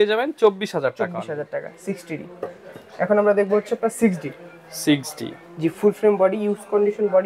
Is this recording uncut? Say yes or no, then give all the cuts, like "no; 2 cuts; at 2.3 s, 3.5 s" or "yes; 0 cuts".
yes; 0 cuts